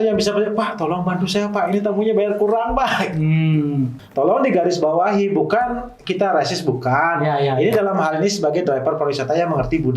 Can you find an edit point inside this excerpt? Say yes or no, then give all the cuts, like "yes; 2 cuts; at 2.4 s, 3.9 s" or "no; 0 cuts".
yes; 1 cut; at 4.0 s